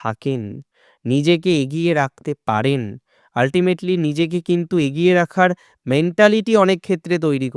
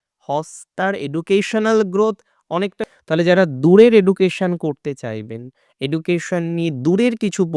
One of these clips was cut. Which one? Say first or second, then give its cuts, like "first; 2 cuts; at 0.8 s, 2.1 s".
second; 1 cut; at 2.8 s